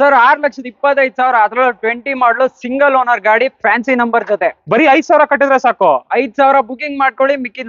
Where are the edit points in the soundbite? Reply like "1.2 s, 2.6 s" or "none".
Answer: none